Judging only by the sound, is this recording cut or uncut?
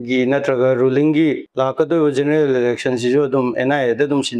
cut